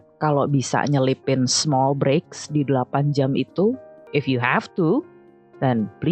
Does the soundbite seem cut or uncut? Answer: cut